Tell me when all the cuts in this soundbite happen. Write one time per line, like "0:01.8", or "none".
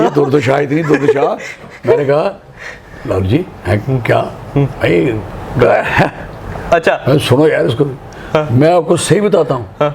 none